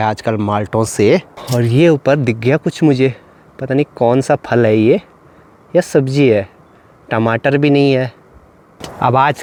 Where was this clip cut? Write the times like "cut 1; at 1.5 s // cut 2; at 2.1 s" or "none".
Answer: none